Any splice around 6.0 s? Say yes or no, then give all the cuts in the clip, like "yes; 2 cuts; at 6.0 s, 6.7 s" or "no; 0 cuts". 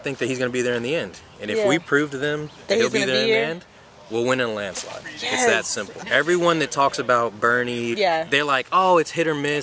yes; 2 cuts; at 6.0 s, 7.9 s